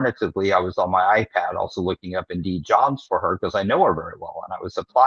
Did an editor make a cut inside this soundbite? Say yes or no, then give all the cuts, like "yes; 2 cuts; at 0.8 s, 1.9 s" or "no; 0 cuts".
no; 0 cuts